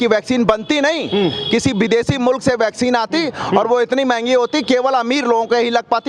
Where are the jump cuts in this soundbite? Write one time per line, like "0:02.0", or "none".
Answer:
none